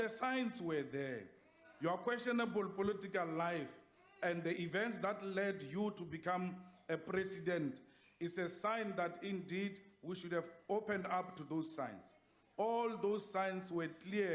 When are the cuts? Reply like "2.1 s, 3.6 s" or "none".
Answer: 6.1 s